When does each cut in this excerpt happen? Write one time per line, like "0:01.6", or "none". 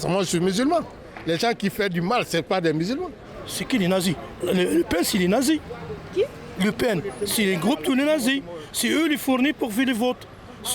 0:03.2

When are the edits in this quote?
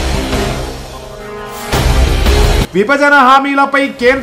none

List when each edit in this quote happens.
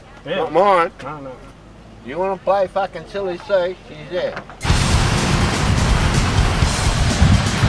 0:04.5

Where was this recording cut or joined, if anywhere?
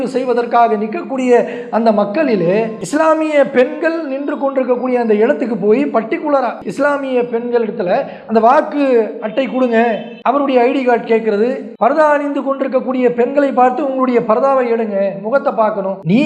0:06.6

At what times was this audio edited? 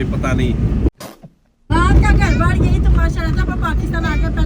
none

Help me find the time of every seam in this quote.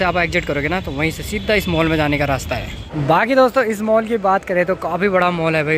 none

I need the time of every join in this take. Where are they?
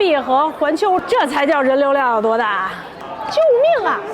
0:01.0
0:03.0

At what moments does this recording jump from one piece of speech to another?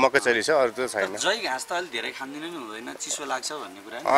none

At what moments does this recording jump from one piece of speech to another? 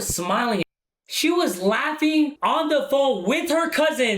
0:01.1
0:02.4

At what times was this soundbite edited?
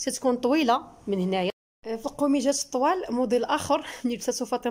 0:01.5

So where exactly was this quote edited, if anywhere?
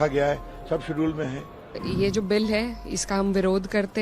0:01.8

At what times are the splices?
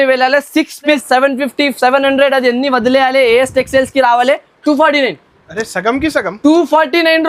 0:01.0

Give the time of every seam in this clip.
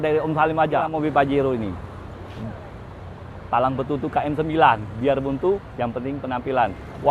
0:00.9

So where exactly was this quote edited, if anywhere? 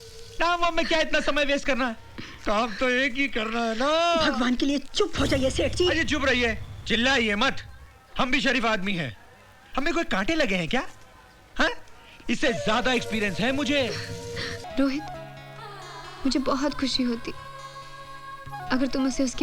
0:14.6

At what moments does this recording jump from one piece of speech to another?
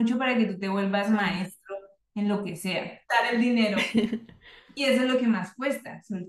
0:03.3

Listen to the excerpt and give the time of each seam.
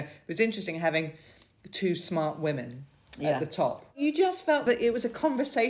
0:04.0

